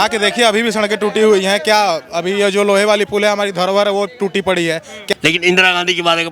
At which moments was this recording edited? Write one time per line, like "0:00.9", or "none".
0:05.1